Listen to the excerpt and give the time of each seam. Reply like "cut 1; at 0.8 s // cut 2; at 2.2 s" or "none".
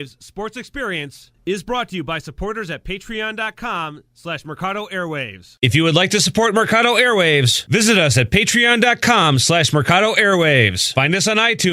cut 1; at 5.5 s